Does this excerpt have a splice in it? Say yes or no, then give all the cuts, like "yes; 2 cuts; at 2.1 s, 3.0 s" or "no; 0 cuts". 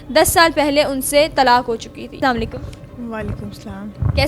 no; 0 cuts